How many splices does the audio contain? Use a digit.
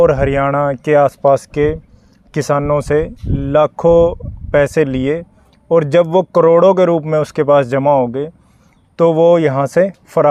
0